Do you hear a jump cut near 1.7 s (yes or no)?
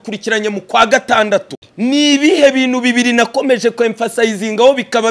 yes